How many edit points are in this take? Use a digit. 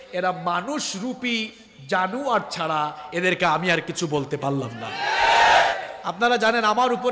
1